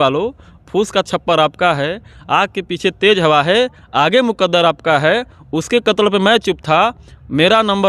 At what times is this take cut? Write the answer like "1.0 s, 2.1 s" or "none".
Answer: none